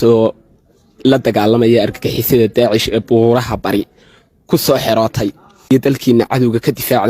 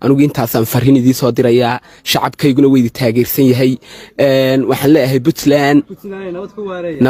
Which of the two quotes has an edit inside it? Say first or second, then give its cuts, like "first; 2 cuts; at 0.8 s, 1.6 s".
first; 1 cut; at 5.7 s